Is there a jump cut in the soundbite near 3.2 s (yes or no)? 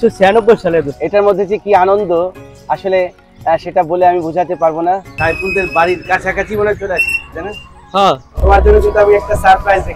no